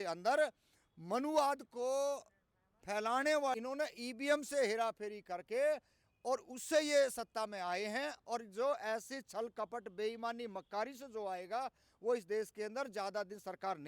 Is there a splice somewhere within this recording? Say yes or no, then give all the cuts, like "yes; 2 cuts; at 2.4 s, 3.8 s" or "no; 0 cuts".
yes; 1 cut; at 3.6 s